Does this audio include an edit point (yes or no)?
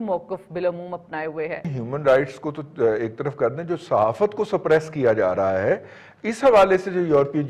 yes